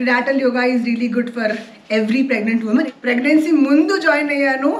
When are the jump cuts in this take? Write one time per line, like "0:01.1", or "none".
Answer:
0:02.9